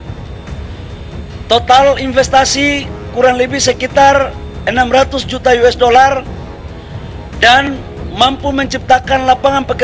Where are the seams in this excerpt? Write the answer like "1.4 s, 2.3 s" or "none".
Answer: none